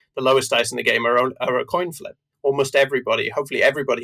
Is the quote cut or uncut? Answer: cut